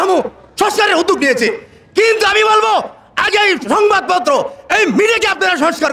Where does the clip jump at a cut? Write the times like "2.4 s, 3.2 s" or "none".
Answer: none